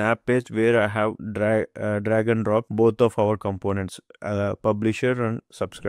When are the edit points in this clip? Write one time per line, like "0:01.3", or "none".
none